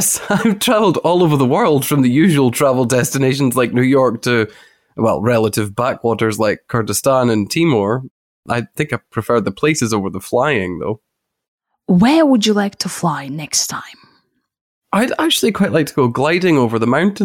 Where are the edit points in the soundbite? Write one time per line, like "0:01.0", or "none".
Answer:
0:08.4